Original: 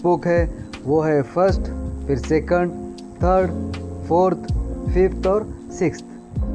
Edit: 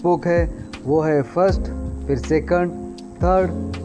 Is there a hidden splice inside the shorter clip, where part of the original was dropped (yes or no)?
no